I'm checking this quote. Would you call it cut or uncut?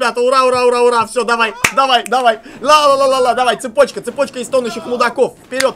uncut